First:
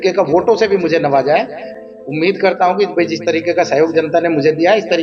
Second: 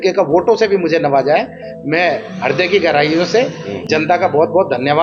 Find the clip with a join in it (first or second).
first